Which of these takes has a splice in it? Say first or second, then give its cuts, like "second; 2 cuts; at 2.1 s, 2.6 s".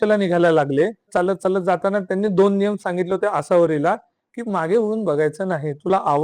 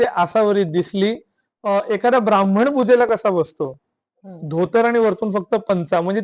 first; 1 cut; at 1.1 s